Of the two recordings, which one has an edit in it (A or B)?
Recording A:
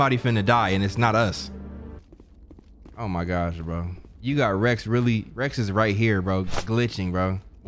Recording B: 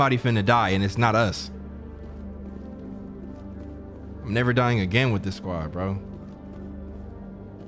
A